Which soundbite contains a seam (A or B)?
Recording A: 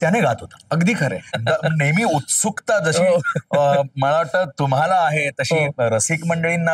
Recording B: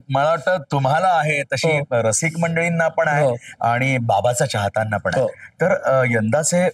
A